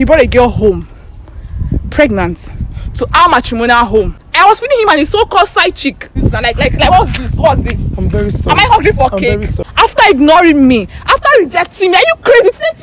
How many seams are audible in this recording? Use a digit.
3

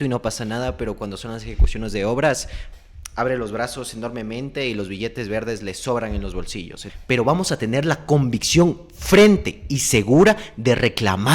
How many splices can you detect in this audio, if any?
1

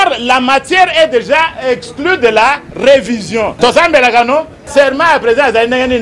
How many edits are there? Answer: 1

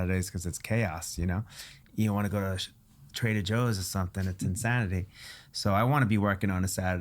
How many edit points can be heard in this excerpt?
1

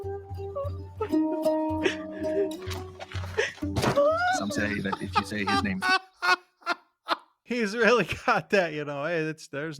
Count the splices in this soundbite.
1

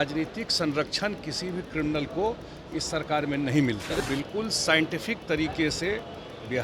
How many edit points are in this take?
1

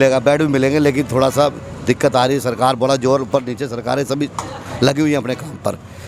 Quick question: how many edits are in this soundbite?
0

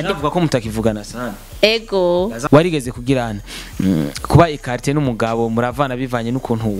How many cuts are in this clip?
2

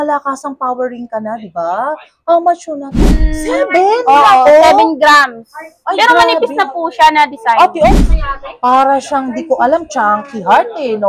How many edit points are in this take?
2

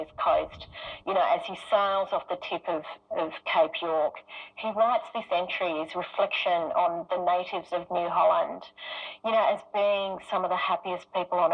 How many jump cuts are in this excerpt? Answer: 0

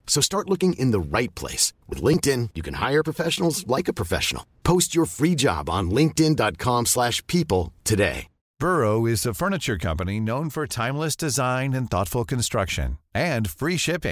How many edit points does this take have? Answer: 1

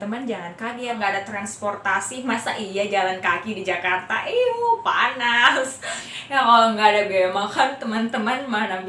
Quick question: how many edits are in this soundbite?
2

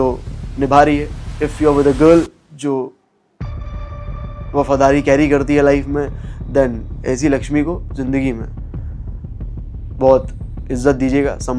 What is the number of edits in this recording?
0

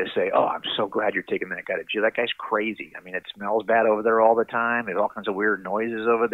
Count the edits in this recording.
1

